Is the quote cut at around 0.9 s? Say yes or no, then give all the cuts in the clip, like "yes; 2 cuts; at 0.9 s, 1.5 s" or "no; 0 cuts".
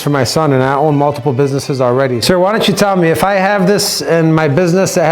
no; 1 cut; at 2.2 s